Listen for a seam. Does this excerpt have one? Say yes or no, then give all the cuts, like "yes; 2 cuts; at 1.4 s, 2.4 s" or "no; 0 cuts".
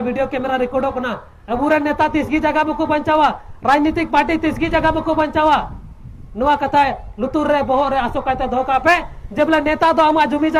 no; 0 cuts